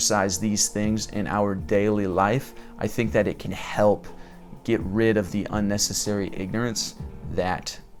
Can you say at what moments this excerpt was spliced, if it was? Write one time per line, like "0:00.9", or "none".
none